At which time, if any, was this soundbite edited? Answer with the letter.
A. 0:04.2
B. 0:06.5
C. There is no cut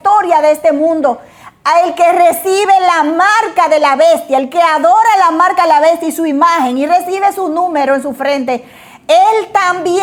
C